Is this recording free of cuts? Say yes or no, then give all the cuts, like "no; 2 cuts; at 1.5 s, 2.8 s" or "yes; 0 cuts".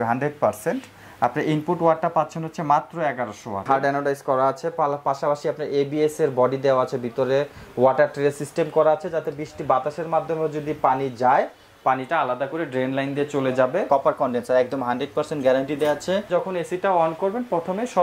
no; 3 cuts; at 3.6 s, 13.9 s, 16.3 s